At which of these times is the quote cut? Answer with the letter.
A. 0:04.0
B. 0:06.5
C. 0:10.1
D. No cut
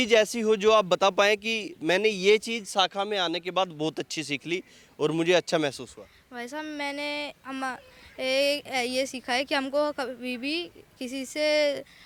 D